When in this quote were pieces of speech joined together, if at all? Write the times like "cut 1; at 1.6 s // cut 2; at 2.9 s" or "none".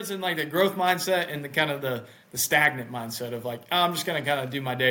none